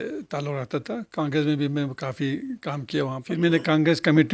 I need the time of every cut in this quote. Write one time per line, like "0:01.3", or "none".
0:03.2